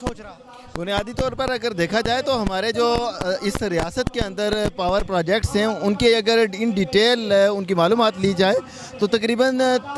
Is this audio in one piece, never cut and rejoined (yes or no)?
yes